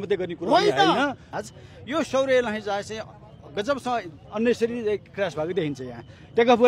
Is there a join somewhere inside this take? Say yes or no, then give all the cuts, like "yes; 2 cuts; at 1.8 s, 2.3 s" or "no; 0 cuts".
yes; 1 cut; at 1.3 s